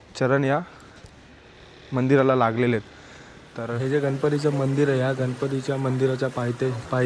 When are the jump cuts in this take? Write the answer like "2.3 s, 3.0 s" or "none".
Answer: 3.7 s

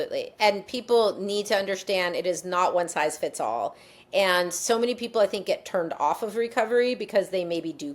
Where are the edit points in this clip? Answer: none

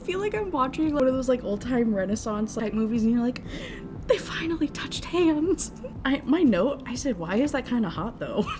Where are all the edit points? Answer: 1.0 s, 2.6 s, 5.9 s

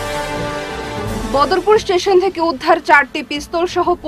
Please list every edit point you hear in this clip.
1.0 s

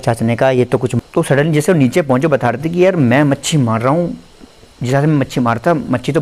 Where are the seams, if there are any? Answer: 1.0 s

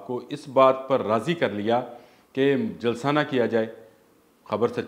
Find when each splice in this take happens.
none

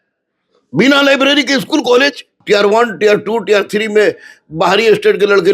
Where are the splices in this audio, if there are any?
2.3 s

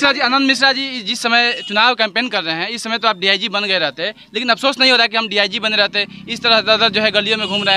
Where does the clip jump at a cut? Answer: none

